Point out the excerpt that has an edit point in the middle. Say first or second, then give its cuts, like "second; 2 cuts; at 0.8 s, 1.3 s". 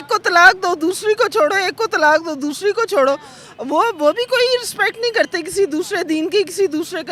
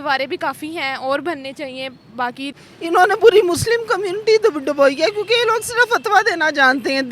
second; 1 cut; at 2.6 s